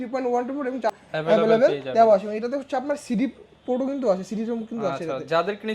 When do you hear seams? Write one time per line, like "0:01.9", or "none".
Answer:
0:01.0